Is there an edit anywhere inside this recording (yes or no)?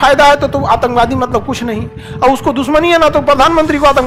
no